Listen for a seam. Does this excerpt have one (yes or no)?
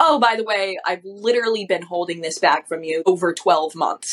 yes